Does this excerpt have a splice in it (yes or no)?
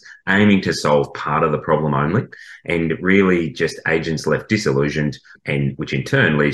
yes